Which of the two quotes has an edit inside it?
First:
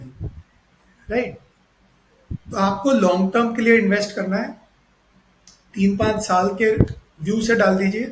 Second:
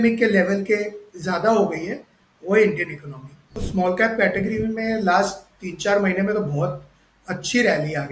second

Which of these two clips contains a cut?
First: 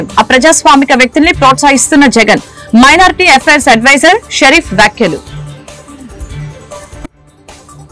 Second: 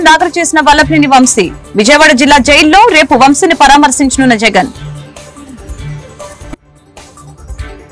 first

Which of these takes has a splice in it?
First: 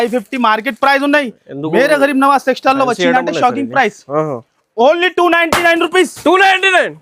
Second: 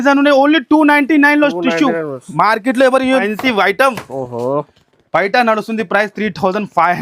second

